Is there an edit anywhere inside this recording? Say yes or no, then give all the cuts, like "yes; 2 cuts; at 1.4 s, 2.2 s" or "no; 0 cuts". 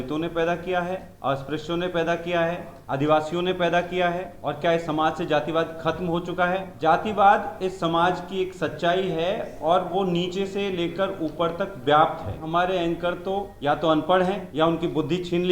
yes; 7 cuts; at 1.1 s, 2.7 s, 4.3 s, 6.7 s, 12.4 s, 13.5 s, 14.5 s